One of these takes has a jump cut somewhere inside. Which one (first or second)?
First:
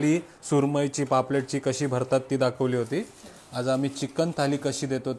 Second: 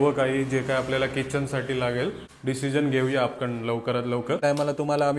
second